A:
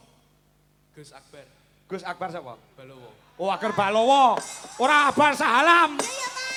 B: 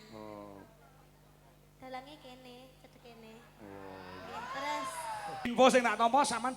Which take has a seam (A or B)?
B